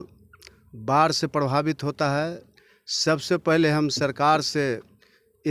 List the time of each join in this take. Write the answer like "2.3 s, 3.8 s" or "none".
none